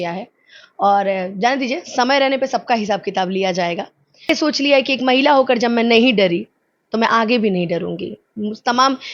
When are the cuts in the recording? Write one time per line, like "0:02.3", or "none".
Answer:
0:04.3